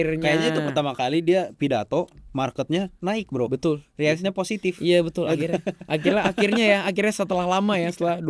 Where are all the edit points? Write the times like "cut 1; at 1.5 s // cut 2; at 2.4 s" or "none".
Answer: none